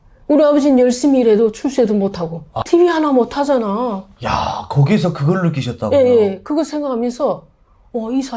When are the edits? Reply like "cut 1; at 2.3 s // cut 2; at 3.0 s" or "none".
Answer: cut 1; at 2.5 s